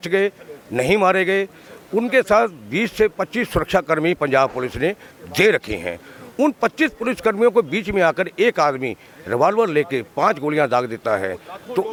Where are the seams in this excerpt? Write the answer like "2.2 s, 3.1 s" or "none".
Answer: none